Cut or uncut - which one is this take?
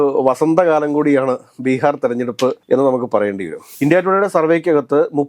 cut